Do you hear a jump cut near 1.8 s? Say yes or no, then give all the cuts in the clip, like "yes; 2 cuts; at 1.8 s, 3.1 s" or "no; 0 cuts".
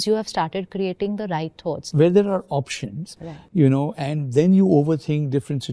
yes; 1 cut; at 1.8 s